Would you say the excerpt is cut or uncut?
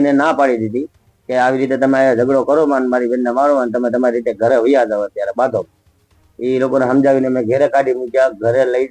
uncut